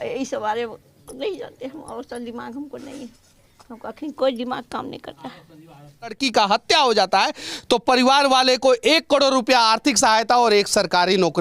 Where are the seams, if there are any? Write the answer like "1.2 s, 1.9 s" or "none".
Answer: 6.2 s

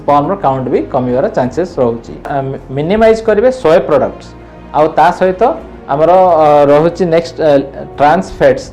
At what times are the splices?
2.4 s

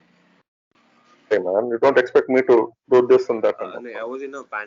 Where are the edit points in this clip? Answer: 1.3 s, 3.7 s

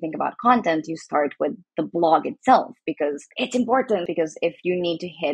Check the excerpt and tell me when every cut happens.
4.0 s

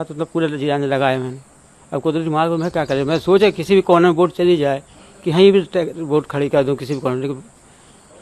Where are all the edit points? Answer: none

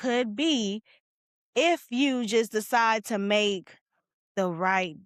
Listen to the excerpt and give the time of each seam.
none

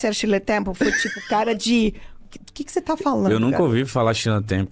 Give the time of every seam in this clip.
none

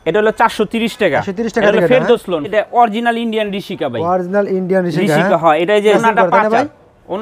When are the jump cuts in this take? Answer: 2.5 s, 6.0 s

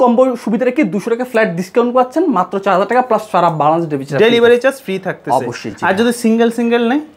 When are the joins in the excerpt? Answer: none

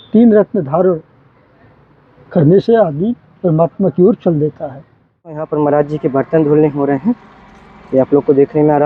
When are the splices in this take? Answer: 5.4 s

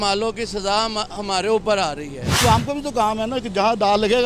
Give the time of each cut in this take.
2.4 s

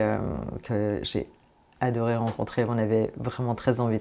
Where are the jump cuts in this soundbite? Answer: none

